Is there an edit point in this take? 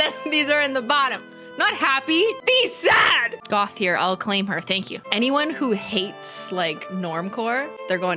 no; 0 cuts

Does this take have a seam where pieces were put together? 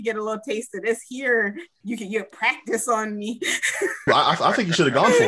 yes; 2 cuts; at 1.7 s, 4.1 s

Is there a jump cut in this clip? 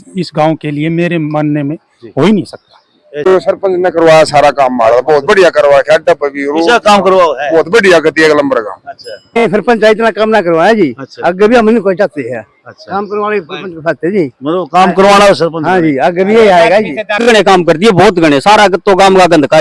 yes; 3 cuts; at 3.3 s, 9.4 s, 17.2 s

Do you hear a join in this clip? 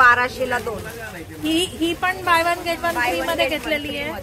no; 0 cuts

